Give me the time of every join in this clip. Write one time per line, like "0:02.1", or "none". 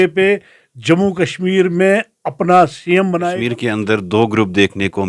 0:03.3